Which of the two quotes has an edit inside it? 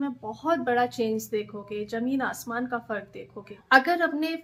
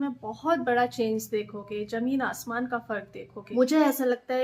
second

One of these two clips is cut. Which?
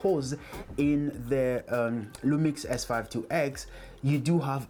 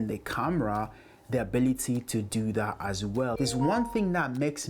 second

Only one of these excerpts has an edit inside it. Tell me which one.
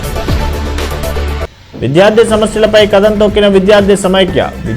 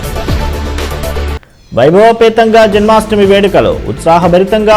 first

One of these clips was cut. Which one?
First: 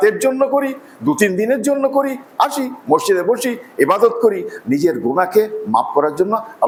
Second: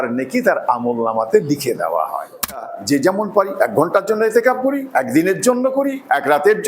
second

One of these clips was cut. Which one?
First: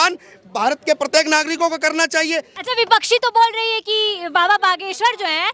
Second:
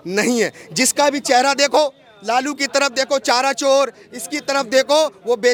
first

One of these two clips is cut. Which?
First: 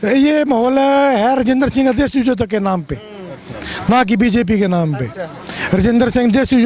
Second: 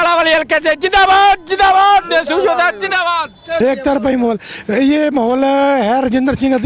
second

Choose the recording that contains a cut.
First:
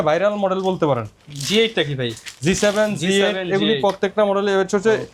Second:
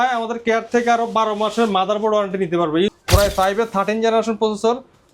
second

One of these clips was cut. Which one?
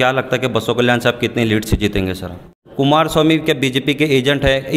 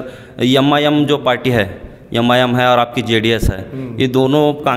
first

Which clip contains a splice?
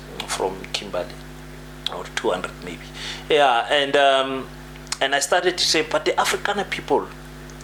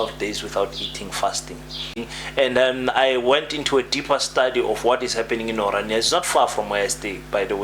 second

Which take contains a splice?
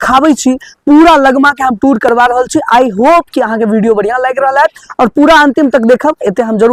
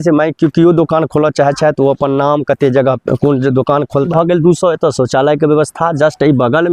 second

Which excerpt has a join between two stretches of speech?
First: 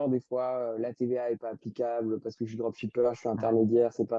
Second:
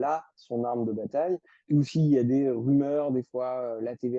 second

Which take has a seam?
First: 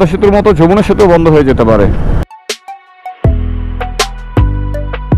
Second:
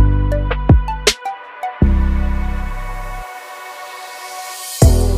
first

